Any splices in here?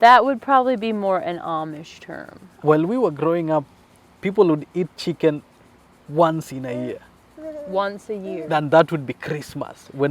yes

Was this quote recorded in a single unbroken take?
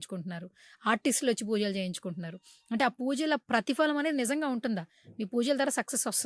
yes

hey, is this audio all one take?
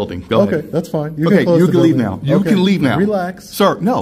yes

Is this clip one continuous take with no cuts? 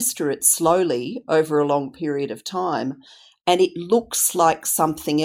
yes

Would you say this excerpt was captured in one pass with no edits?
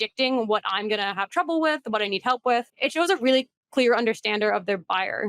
no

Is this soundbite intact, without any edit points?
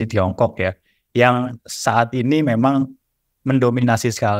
yes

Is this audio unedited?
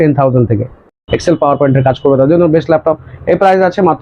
no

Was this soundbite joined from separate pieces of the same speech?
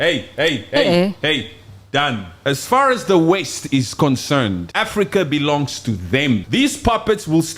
yes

